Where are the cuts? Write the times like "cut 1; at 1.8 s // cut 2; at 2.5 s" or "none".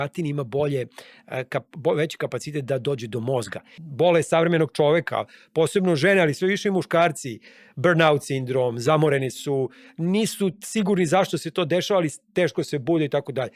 cut 1; at 3.8 s

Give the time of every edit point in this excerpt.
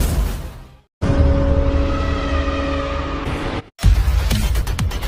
none

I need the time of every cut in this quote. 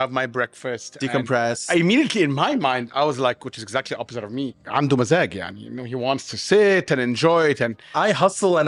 cut 1; at 1.6 s // cut 2; at 4.6 s // cut 3; at 7.9 s

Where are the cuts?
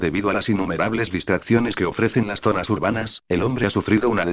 cut 1; at 3.2 s

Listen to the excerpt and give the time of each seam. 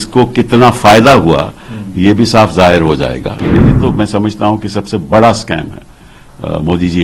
cut 1; at 3.4 s

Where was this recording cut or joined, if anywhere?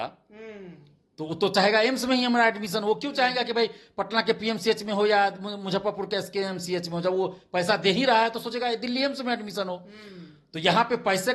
none

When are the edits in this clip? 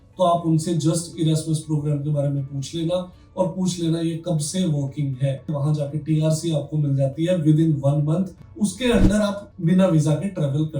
cut 1; at 5.5 s // cut 2; at 8.4 s // cut 3; at 9.5 s

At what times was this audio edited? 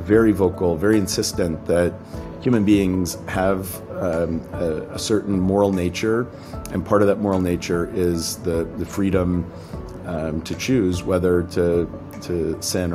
none

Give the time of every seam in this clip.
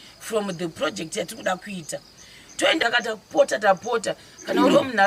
cut 1; at 2.8 s

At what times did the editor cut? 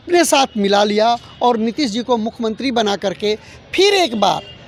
none

